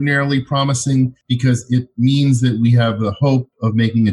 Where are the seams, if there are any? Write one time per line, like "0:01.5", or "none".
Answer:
0:01.2